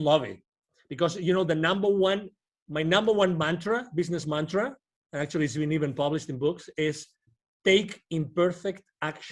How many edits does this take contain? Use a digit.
0